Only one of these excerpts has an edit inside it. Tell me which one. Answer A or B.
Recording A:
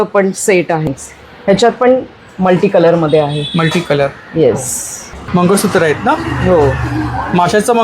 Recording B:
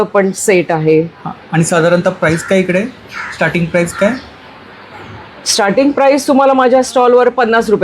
A